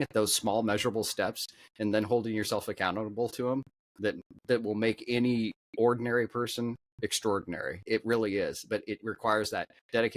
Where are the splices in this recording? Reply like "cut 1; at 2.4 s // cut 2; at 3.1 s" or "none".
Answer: cut 1; at 7.8 s